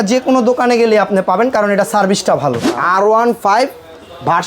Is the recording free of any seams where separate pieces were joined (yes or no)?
no